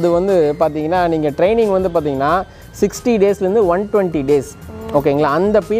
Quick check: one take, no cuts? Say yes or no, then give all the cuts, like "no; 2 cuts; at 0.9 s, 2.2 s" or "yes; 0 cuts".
yes; 0 cuts